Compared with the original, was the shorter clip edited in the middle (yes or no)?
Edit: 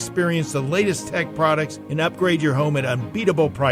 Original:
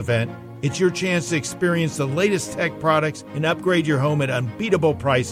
no